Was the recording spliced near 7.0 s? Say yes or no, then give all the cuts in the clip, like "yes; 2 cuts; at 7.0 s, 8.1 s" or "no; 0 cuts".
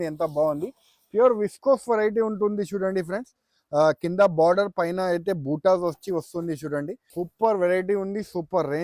yes; 1 cut; at 7.0 s